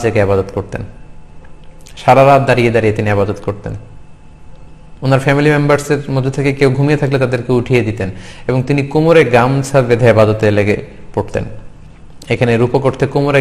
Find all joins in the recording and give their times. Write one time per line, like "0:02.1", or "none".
0:02.8